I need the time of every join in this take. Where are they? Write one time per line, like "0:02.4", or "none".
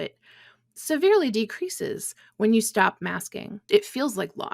0:03.6